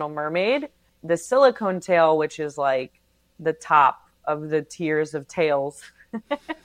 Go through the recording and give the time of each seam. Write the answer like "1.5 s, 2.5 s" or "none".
0.9 s